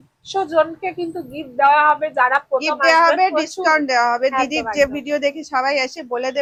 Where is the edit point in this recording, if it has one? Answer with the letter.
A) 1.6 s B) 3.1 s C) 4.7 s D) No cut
D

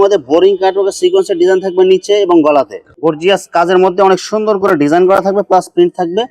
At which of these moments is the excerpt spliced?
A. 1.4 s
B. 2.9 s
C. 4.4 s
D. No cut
B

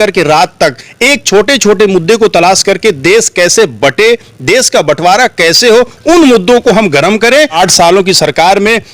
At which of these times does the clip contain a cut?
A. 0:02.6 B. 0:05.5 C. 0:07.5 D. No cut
C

